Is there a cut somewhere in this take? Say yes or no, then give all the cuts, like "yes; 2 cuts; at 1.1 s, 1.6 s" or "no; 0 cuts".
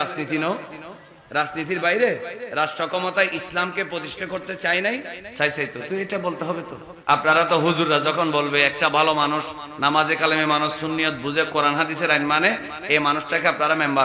yes; 3 cuts; at 2.4 s, 5.2 s, 6.8 s